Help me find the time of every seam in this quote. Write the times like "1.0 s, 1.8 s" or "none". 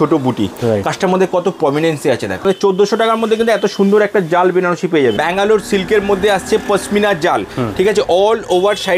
2.4 s, 5.2 s